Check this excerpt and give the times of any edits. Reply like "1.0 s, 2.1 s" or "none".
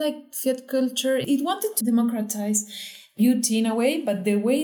1.4 s, 3.1 s